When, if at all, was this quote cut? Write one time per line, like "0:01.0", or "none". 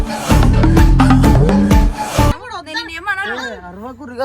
0:02.4